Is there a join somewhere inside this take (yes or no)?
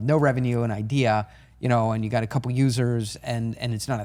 no